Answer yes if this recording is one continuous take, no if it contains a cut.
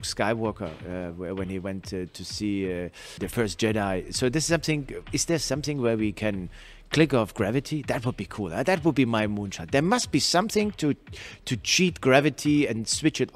no